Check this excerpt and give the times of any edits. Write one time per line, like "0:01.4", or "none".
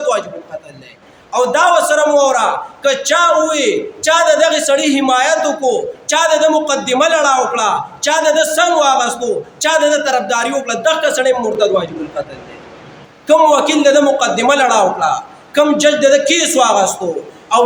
none